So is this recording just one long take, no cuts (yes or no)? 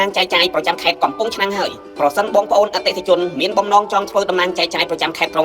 yes